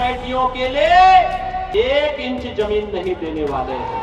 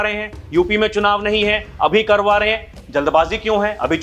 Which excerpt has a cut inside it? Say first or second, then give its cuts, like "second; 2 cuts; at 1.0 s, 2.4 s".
first; 1 cut; at 1.7 s